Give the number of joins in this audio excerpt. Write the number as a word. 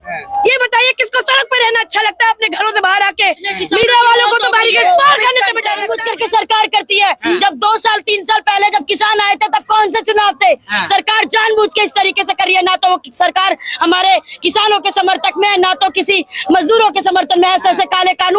one